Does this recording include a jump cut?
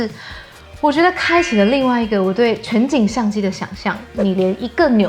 yes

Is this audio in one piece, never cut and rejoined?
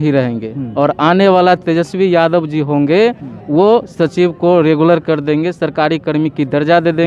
yes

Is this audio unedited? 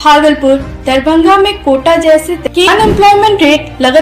no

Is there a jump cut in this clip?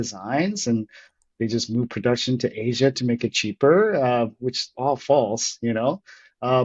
no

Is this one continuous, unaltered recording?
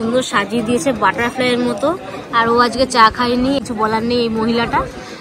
yes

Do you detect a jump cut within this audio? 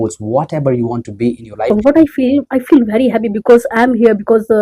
yes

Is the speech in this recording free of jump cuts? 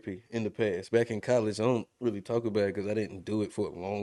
yes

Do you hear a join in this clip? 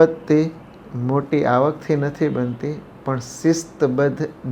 no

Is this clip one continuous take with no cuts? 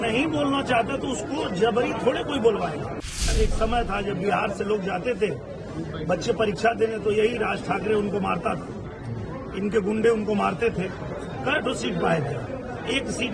no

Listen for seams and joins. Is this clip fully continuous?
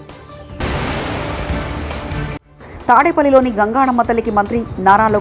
no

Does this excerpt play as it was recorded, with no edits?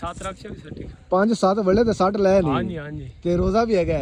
yes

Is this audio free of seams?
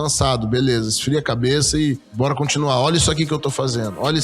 no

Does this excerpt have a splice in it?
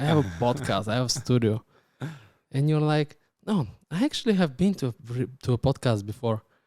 no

